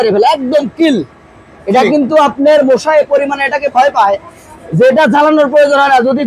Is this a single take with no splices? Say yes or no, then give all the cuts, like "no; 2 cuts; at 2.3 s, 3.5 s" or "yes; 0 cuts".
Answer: yes; 0 cuts